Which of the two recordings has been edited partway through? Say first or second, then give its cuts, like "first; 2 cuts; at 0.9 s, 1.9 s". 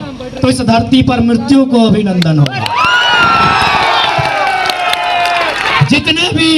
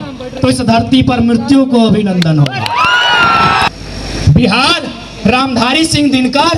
second; 1 cut; at 3.7 s